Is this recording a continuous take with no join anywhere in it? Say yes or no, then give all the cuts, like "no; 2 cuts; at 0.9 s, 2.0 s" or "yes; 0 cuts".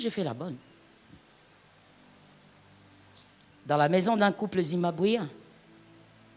yes; 0 cuts